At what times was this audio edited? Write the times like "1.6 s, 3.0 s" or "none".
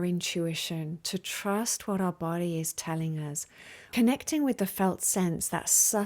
3.9 s